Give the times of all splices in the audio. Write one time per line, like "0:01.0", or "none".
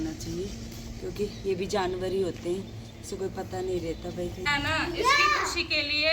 0:04.5